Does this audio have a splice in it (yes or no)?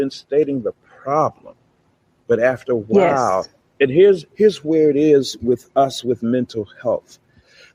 no